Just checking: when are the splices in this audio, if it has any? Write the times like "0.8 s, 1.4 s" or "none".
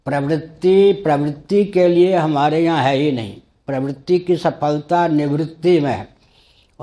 none